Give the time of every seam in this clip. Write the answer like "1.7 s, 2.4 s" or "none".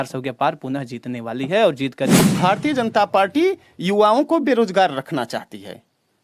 2.2 s